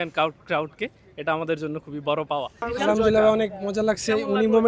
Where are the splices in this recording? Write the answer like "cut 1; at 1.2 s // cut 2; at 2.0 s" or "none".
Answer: cut 1; at 2.5 s